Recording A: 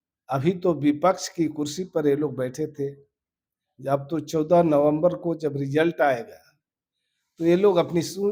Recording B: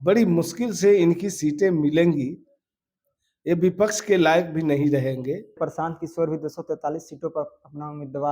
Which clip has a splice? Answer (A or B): B